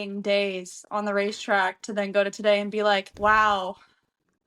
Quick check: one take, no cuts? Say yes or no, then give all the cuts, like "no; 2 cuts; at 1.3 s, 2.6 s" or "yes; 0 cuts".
no; 1 cut; at 3.1 s